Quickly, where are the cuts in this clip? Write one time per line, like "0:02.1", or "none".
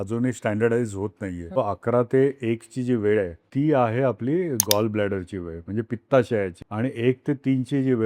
0:01.6
0:03.4
0:06.6